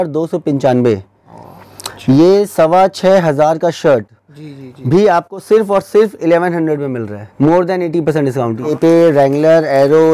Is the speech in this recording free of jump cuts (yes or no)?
no